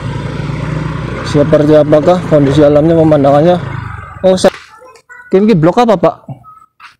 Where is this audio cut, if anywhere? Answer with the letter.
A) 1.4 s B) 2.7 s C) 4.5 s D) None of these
C